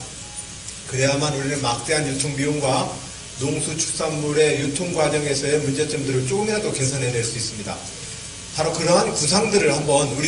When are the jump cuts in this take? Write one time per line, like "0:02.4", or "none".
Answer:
0:03.3